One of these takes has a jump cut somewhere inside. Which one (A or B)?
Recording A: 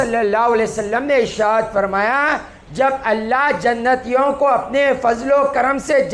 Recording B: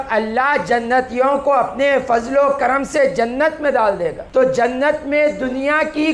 B